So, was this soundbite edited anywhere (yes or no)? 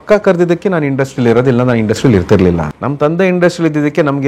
yes